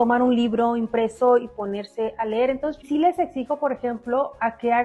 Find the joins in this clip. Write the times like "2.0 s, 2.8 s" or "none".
2.8 s